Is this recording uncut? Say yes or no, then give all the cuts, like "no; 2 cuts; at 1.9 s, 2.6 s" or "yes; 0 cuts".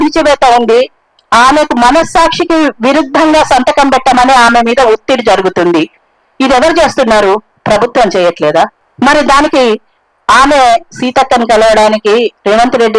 yes; 0 cuts